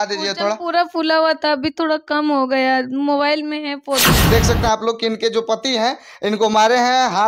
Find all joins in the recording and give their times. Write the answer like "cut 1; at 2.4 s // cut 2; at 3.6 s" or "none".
cut 1; at 4.2 s